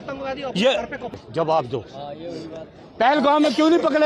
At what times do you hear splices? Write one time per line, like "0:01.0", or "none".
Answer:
0:01.2